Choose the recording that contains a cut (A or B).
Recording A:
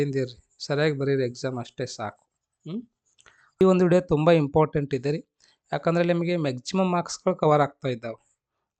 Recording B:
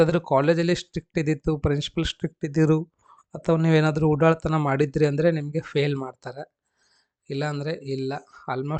A